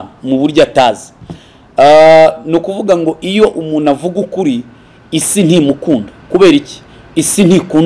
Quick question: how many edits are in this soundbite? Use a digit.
0